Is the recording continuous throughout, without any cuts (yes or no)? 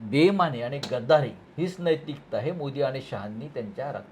no